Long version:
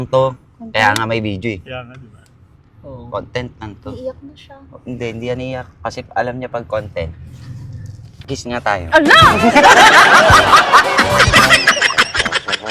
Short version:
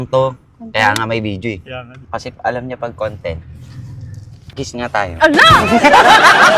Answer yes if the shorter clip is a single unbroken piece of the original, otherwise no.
no